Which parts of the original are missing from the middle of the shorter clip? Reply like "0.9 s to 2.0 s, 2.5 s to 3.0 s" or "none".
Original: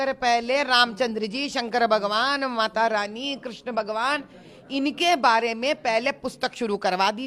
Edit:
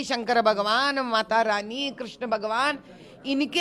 none